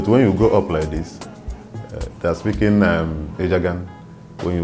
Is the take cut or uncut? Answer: uncut